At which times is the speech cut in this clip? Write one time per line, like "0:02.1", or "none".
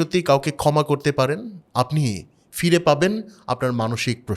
0:01.6